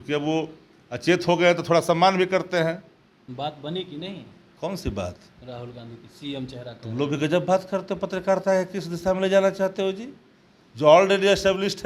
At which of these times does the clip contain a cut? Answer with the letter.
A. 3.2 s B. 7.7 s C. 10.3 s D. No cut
A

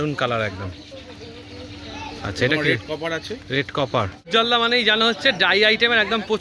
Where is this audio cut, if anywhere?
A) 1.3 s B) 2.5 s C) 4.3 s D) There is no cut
C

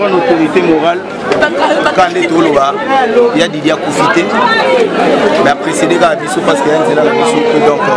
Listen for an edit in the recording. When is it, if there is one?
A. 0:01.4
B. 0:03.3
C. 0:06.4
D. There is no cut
A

